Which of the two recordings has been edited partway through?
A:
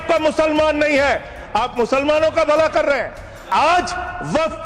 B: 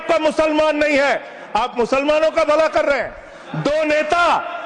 A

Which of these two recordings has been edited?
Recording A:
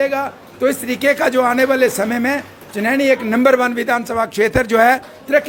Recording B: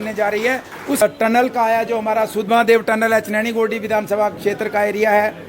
B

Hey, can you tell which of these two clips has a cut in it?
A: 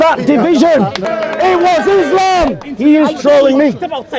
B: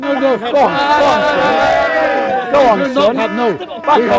A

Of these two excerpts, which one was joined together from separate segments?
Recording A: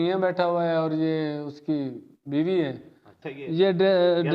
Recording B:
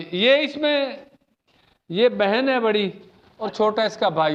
A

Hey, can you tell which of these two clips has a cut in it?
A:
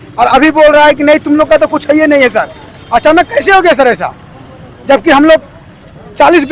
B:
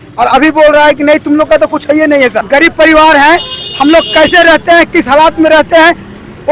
B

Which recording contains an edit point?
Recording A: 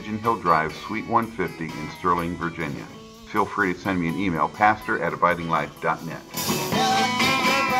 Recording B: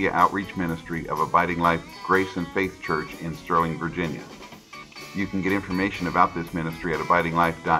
A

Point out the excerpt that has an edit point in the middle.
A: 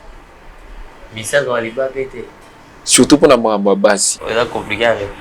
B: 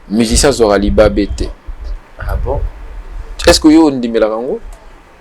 A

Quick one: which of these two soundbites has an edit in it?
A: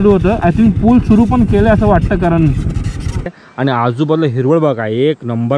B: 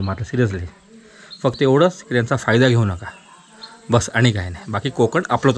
A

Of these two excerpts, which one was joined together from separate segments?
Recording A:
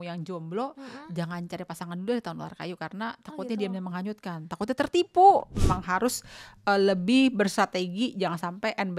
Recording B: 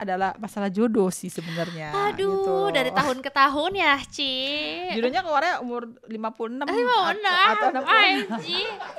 A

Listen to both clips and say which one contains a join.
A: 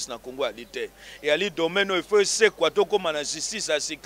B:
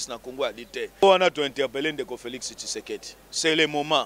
B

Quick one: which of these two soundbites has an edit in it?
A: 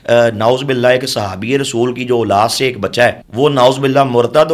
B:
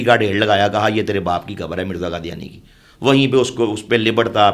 A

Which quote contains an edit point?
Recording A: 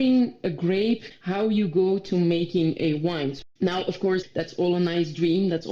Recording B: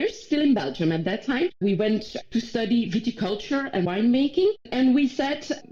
A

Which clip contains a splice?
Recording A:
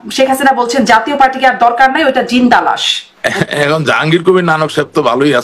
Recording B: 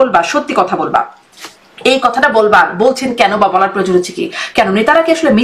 A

